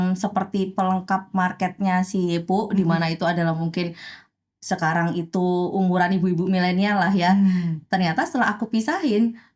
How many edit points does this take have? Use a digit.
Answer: 0